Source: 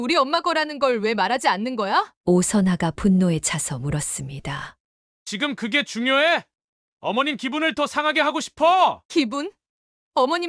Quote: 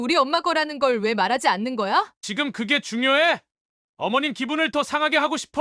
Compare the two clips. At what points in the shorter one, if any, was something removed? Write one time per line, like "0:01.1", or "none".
0:02.1